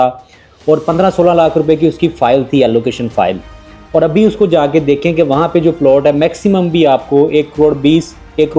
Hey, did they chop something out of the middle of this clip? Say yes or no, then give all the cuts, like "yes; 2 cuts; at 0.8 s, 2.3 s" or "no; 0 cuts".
no; 0 cuts